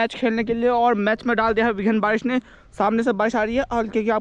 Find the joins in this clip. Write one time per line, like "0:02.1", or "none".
none

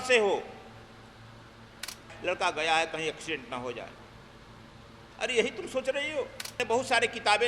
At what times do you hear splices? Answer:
0:02.1
0:06.5

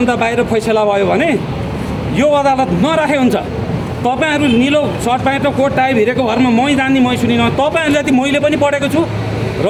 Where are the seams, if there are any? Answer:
none

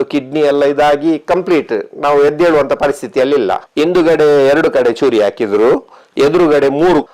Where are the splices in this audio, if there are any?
0:03.6

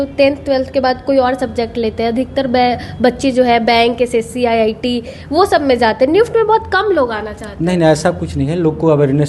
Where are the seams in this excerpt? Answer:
none

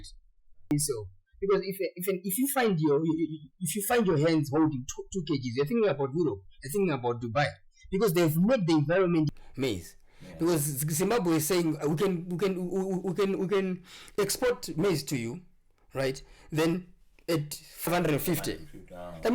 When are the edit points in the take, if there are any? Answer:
0:00.7
0:09.4
0:17.9

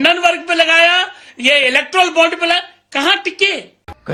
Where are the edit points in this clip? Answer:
none

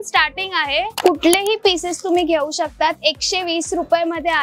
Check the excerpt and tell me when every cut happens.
0:00.9

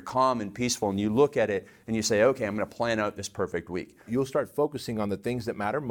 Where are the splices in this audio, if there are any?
0:04.1

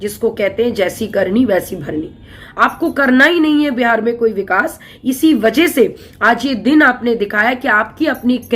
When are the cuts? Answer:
0:02.4

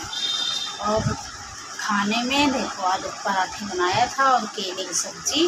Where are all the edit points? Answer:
none

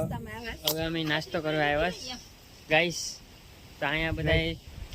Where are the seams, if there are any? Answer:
none

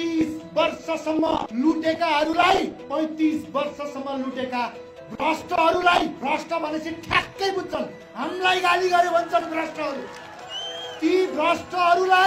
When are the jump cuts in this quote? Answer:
0:01.5
0:02.8
0:06.2

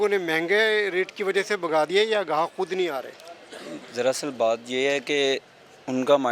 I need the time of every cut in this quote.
none

